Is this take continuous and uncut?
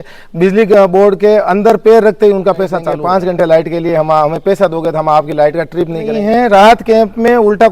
no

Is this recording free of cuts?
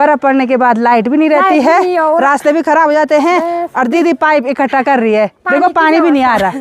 yes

